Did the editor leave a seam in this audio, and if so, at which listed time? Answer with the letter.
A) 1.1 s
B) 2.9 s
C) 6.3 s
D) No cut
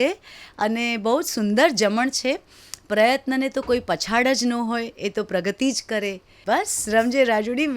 C